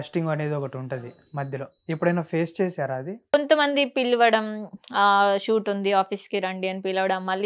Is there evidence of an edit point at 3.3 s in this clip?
yes; 1 cut; at 3.3 s

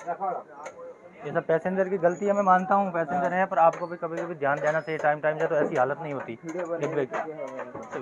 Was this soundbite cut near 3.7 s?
no; 0 cuts

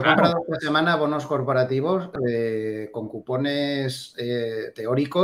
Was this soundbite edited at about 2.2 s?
yes; 1 cut; at 2.2 s

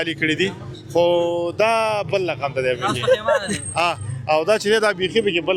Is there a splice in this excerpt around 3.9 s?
no; 0 cuts

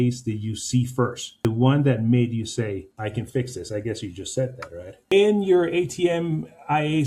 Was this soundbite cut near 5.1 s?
yes; 1 cut; at 5.1 s

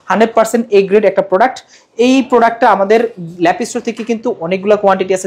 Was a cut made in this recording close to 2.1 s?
no; 0 cuts

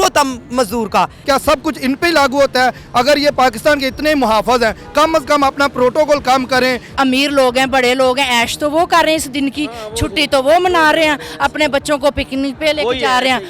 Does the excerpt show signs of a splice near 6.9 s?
yes; 2 cuts; at 1.2 s, 6.9 s

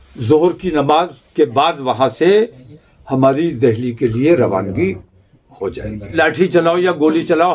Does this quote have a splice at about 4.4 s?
no; 1 cut; at 6.1 s

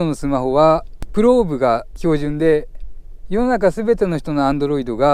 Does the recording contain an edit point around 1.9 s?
yes; 2 cuts; at 1.0 s, 1.9 s

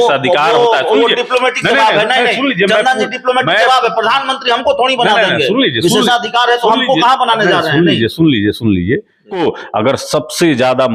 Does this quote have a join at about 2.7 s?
no; 1 cut; at 9.4 s

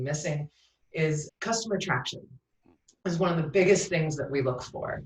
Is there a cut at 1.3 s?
yes; 1 cut; at 1.3 s

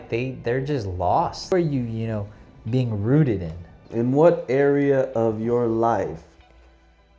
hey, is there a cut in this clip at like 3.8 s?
yes; 2 cuts; at 1.5 s, 3.8 s

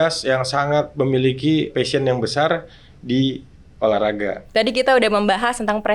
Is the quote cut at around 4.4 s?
yes; 3 cuts; at 0.9 s, 1.7 s, 4.4 s

